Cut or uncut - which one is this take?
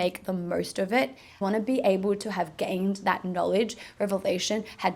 cut